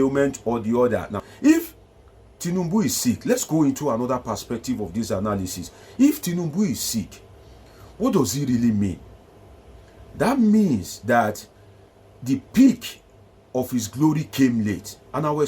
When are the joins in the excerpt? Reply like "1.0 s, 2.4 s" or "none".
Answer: 1.3 s